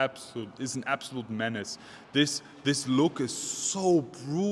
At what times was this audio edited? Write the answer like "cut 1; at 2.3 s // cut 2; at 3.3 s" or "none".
none

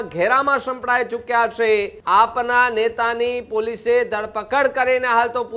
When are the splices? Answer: cut 1; at 1.9 s

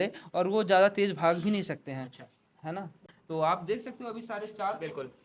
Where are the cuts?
cut 1; at 3.0 s

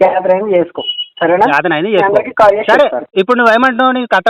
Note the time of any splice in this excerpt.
none

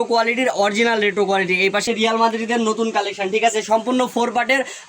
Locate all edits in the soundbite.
cut 1; at 1.8 s

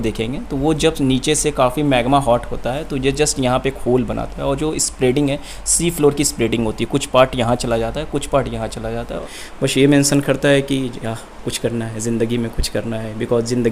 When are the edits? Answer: cut 1; at 9.2 s

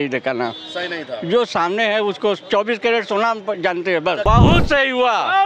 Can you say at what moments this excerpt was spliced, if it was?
cut 1; at 4.2 s

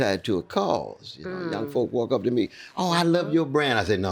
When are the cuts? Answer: none

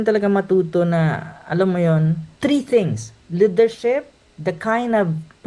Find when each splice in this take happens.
cut 1; at 2.3 s

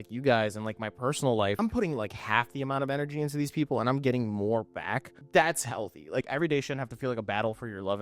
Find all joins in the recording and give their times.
cut 1; at 1.6 s // cut 2; at 5.1 s // cut 3; at 6.2 s

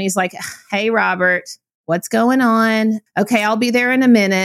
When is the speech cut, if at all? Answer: cut 1; at 3.0 s

